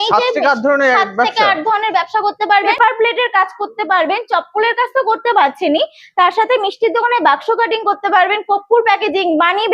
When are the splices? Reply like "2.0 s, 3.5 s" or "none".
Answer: 2.7 s